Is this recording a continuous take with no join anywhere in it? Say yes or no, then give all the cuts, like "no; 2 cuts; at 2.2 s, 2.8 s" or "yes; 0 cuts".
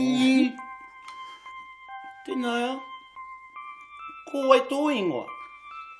no; 3 cuts; at 2.8 s, 4.1 s, 5.3 s